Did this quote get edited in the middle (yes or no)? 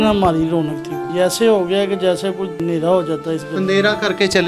yes